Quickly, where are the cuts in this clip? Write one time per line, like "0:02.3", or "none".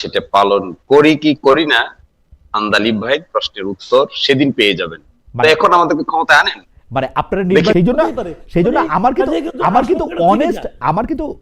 0:07.7

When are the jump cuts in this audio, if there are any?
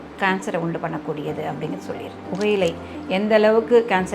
0:02.3

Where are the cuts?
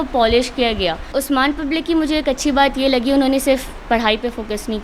0:01.1

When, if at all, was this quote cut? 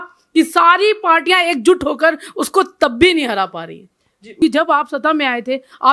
0:04.4

